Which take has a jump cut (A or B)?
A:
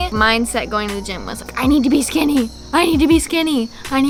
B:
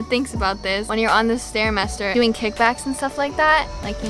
B